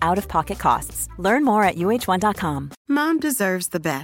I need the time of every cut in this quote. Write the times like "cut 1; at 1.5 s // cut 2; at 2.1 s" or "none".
none